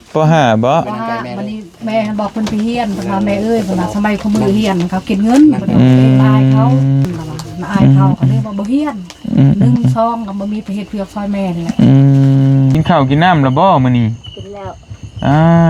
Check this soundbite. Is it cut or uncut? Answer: cut